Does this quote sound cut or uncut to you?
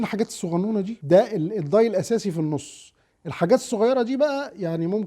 cut